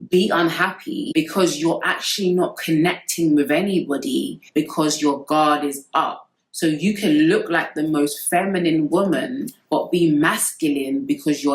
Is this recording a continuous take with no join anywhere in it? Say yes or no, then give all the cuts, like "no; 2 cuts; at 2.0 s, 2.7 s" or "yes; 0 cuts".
no; 1 cut; at 1.0 s